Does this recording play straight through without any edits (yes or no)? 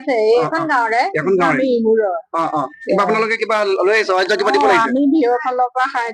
yes